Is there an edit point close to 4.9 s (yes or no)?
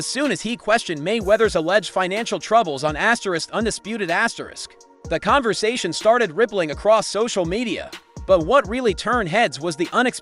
yes